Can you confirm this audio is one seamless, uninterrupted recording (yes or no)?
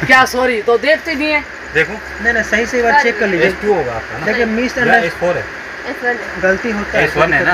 yes